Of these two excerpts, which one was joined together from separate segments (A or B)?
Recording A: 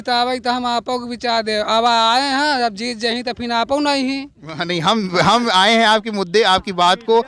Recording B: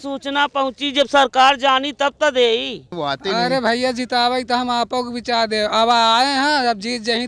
B